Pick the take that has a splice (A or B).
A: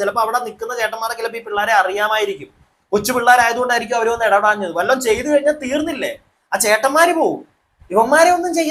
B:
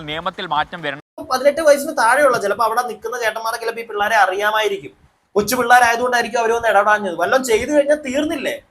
B